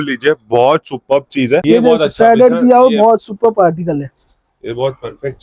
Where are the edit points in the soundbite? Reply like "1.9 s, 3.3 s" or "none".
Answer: 1.6 s